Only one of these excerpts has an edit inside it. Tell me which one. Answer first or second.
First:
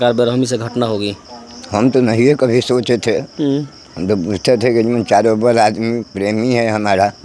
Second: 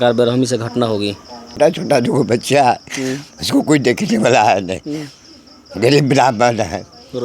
second